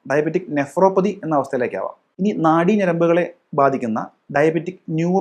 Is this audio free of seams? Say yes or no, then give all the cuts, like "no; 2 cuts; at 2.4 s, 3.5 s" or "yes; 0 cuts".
no; 1 cut; at 2.0 s